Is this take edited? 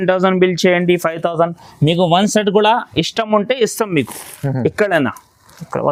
no; 0 cuts

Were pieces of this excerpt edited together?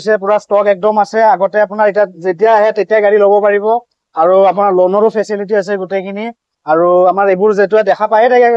no; 0 cuts

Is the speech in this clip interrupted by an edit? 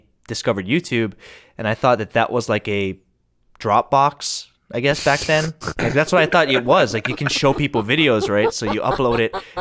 no; 0 cuts

